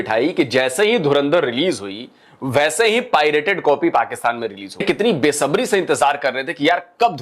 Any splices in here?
yes; 1 cut; at 4.8 s

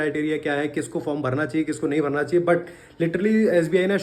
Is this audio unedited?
yes; 0 cuts

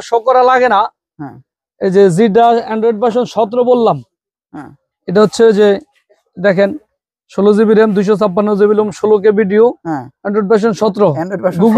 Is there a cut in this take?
no; 0 cuts

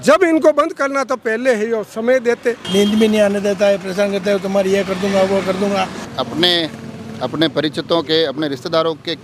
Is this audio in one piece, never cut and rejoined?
no; 2 cuts; at 2.6 s, 6.0 s

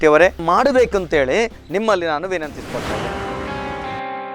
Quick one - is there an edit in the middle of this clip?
yes; 2 cuts; at 1.6 s, 3.0 s

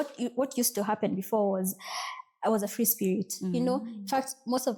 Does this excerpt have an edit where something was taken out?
no; 0 cuts

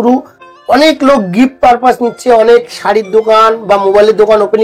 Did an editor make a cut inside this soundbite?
no; 0 cuts

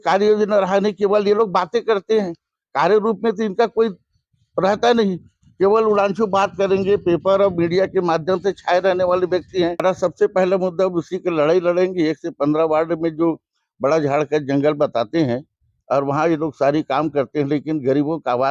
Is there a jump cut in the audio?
yes; 1 cut; at 9.8 s

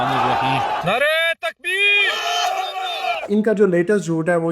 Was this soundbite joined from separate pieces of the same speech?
yes; 1 cut; at 3.2 s

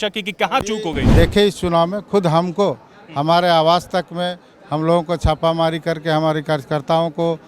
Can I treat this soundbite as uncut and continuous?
no; 1 cut; at 1.0 s

